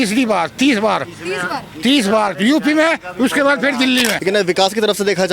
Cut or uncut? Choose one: cut